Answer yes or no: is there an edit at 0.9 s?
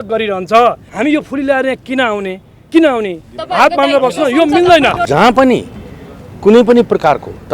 yes